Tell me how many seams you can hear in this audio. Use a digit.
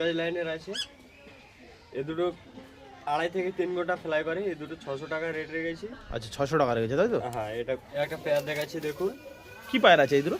1